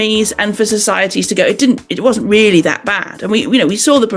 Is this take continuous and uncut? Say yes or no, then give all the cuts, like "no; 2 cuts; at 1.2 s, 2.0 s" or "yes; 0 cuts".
yes; 0 cuts